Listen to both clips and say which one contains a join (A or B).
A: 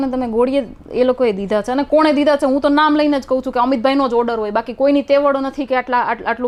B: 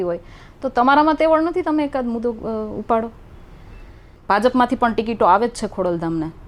B